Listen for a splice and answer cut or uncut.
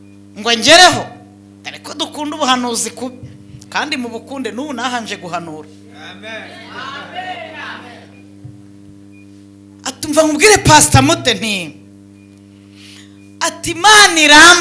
uncut